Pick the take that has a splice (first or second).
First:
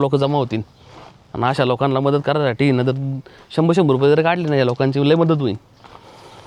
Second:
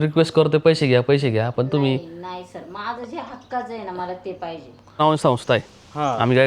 second